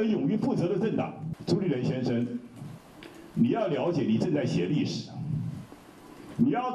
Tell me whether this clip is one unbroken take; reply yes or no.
no